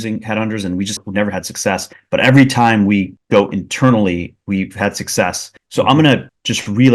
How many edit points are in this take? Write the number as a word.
one